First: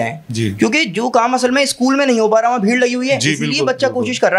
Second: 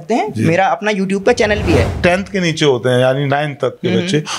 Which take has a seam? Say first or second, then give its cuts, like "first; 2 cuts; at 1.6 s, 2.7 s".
second; 1 cut; at 1.9 s